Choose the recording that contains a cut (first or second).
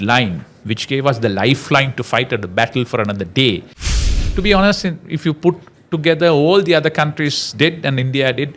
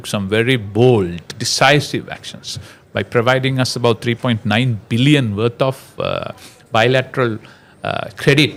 first